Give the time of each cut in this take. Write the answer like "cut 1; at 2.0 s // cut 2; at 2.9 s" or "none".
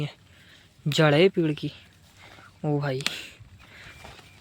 none